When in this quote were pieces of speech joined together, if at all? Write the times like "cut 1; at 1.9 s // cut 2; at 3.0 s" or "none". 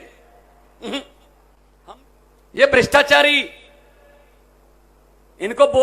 cut 1; at 1.6 s